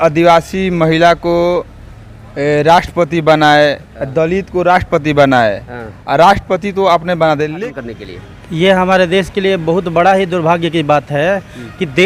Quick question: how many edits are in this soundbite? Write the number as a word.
one